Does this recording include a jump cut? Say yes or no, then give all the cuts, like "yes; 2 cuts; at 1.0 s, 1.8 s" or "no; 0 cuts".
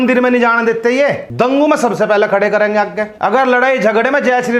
yes; 2 cuts; at 1.2 s, 3.0 s